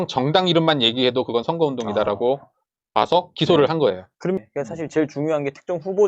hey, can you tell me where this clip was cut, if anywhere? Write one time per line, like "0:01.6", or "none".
0:04.4